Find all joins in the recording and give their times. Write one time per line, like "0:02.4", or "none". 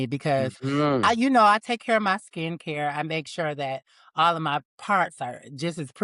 none